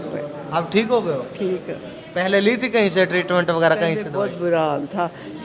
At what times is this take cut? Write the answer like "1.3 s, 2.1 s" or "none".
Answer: none